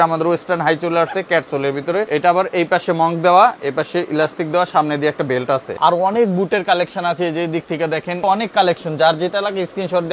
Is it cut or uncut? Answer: cut